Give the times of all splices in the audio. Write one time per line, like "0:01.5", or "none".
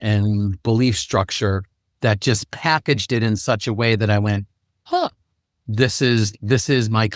none